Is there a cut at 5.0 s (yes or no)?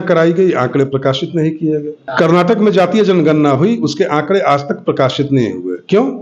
no